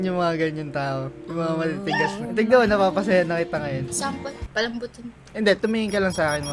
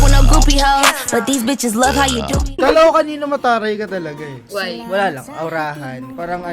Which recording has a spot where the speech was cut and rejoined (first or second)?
second